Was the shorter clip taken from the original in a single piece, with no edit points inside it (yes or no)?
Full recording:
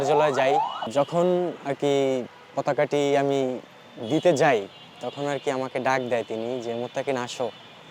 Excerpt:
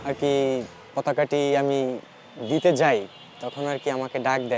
yes